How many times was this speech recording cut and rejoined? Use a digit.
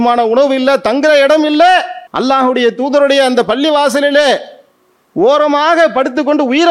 1